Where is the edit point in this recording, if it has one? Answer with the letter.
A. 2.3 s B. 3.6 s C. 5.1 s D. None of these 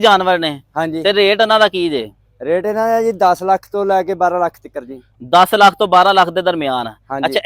D